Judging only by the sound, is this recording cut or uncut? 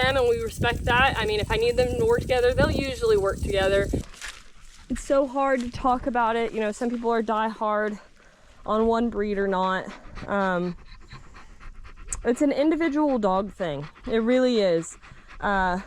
cut